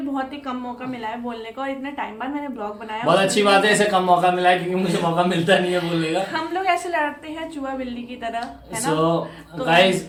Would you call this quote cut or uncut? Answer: uncut